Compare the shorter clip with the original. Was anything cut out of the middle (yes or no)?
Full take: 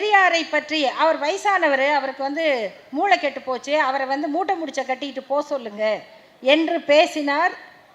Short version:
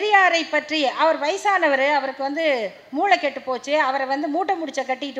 no